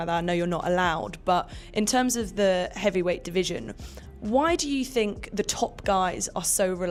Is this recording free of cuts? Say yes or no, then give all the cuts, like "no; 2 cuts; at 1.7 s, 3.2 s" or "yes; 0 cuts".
yes; 0 cuts